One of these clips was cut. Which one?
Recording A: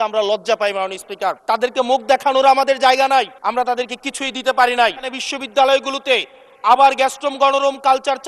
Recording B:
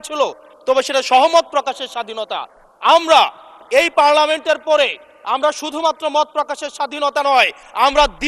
A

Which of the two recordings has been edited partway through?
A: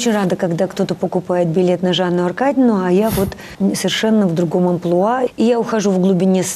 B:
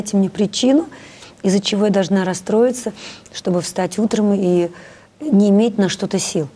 A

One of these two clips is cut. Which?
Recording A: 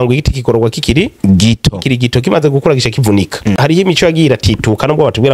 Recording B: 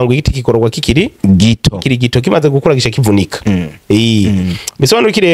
A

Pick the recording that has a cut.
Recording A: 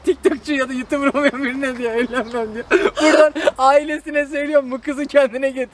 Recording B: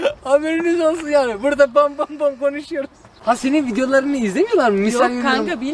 B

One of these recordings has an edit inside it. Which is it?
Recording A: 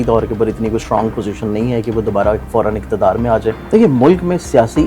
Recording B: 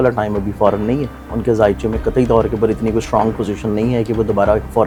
A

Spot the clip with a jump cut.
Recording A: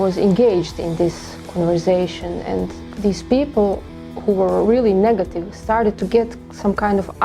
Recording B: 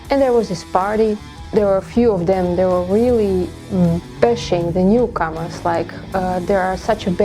B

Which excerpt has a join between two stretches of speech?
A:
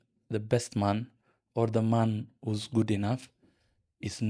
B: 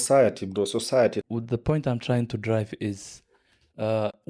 B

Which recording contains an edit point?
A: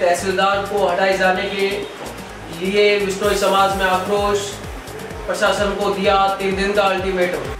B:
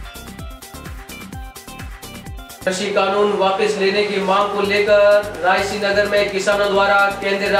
B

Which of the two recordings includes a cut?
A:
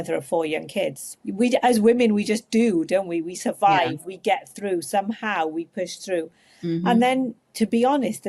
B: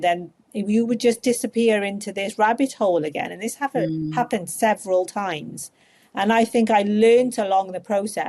A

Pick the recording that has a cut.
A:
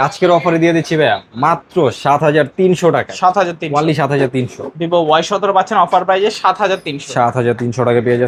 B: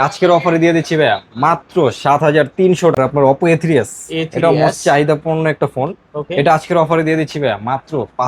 B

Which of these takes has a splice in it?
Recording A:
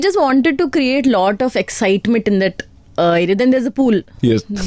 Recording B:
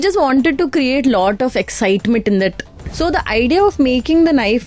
B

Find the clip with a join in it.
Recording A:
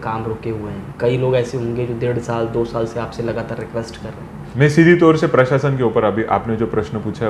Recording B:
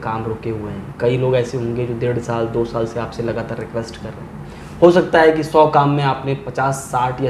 A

